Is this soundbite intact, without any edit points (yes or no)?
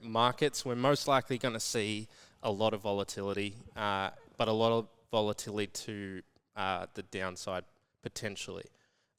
yes